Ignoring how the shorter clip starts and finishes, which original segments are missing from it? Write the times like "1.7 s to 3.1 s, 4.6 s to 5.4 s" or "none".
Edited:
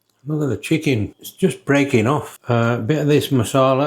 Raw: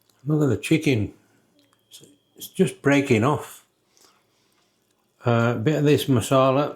1.2 s to 2.4 s, 3.5 s to 5.1 s